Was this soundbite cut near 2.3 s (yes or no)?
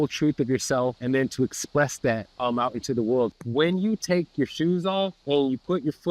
yes